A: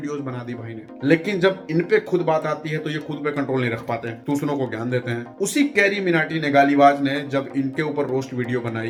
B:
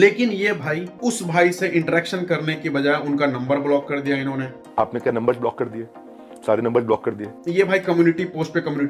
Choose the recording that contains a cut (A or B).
B